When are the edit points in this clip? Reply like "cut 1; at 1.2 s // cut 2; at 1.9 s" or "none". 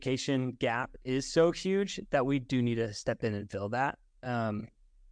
none